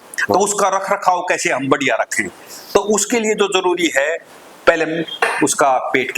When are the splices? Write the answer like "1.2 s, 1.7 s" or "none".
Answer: none